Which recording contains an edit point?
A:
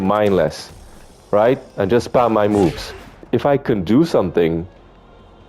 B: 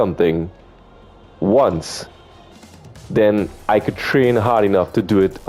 A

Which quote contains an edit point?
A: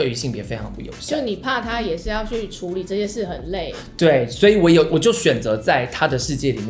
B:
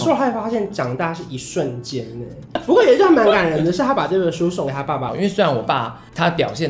B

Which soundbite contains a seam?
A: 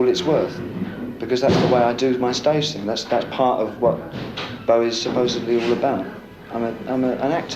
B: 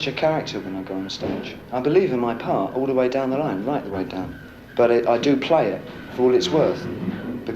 B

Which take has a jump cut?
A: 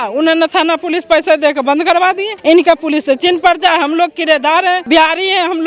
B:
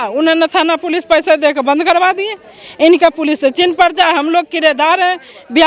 A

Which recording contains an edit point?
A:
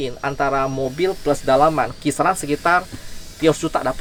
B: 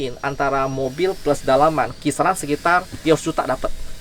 B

